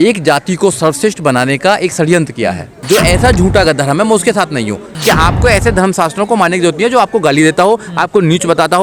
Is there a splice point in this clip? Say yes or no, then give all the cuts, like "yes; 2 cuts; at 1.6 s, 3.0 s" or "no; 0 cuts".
yes; 2 cuts; at 2.7 s, 4.9 s